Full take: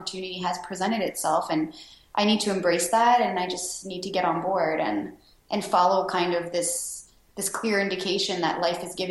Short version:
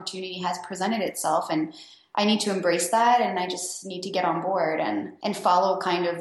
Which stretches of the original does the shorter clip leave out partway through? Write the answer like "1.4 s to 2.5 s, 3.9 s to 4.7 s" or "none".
5.1 s to 5.4 s